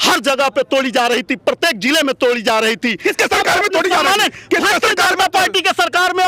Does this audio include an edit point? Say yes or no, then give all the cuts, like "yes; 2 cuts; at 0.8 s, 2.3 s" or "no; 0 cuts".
no; 0 cuts